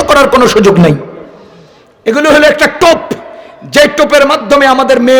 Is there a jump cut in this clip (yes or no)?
no